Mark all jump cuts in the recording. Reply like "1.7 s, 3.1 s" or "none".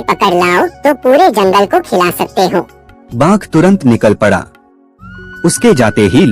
none